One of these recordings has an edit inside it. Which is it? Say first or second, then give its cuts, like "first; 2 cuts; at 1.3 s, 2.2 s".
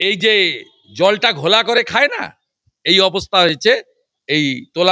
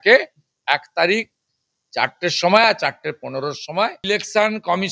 second; 1 cut; at 4.0 s